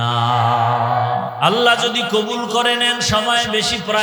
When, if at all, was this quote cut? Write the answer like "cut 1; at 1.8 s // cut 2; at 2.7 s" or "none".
cut 1; at 1.3 s